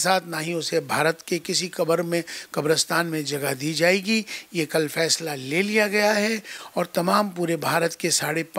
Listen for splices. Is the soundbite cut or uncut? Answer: uncut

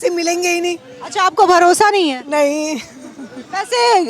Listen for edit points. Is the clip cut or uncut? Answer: uncut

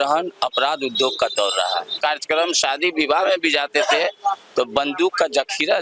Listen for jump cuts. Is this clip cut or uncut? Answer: cut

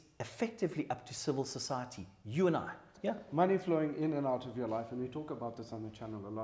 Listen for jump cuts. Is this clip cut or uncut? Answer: cut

